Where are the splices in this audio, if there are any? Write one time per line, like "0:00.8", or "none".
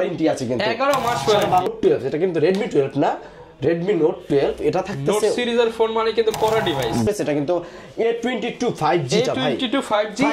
0:01.7
0:07.1